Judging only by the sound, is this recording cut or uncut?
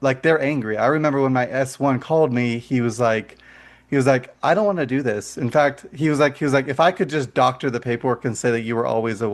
uncut